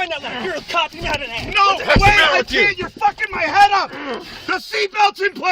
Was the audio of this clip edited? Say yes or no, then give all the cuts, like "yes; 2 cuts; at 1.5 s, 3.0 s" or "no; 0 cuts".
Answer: yes; 1 cut; at 4.0 s